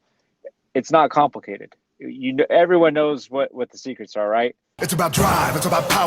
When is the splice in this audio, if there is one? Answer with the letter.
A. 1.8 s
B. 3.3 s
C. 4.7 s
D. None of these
C